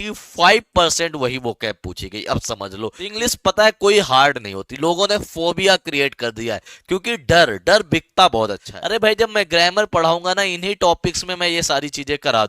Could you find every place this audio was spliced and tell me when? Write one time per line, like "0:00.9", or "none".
0:03.1
0:08.7